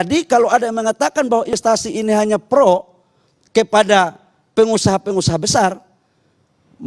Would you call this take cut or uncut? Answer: cut